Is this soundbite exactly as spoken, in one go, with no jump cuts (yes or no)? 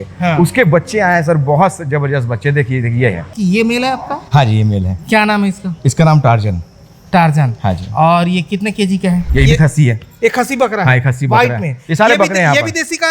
no